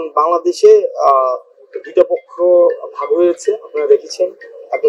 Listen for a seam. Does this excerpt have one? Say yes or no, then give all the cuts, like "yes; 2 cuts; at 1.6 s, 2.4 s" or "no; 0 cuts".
no; 0 cuts